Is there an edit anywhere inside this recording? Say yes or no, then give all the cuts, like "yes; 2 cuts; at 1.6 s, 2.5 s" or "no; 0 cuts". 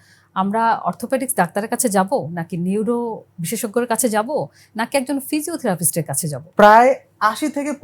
yes; 1 cut; at 6.4 s